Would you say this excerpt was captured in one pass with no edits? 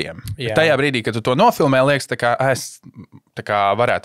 yes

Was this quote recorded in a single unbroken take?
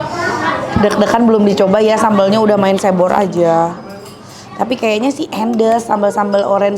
yes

